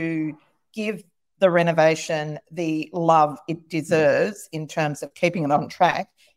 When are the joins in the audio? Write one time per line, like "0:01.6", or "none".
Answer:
none